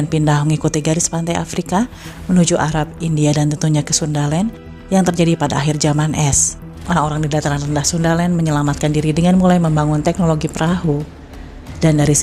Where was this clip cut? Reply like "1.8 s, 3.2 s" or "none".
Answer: 6.8 s